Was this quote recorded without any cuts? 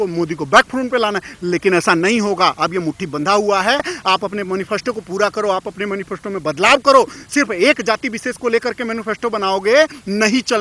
no; 1 cut; at 3.9 s

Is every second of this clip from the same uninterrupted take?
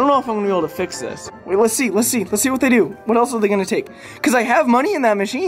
no; 1 cut; at 1.4 s

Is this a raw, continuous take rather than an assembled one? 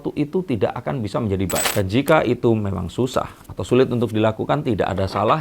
no; 1 cut; at 1.7 s

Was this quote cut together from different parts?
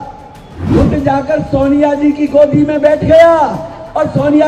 no; 0 cuts

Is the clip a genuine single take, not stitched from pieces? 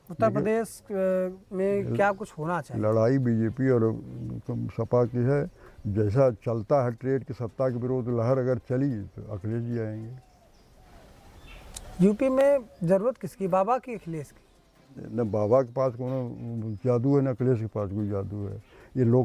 yes; 0 cuts

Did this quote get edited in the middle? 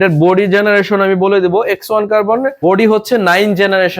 yes; 1 cut; at 2.6 s

